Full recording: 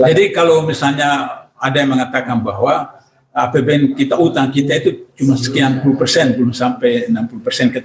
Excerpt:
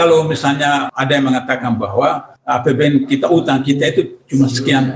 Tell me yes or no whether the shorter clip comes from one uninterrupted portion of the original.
no